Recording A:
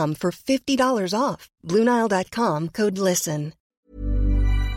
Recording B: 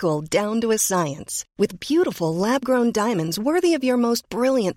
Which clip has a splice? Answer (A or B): A